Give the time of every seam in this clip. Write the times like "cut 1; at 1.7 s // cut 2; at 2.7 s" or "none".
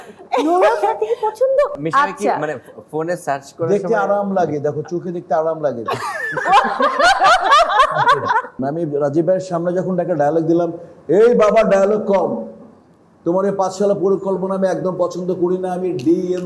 cut 1; at 1.8 s // cut 2; at 8.6 s